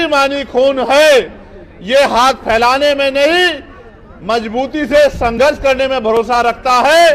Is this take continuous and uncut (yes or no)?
yes